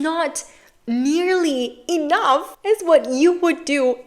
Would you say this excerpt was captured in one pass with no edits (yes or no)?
no